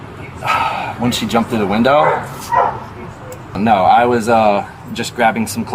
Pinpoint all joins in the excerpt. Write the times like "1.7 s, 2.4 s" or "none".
3.6 s